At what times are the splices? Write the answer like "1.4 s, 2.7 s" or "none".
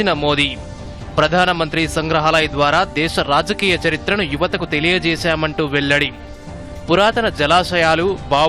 none